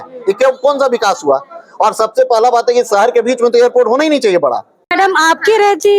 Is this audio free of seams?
no; 1 cut; at 4.9 s

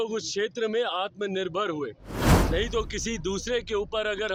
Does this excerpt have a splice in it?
no; 0 cuts

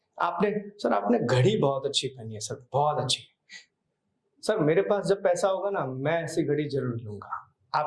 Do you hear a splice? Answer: no; 0 cuts

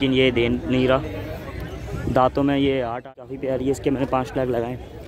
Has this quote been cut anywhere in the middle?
yes; 1 cut; at 3.2 s

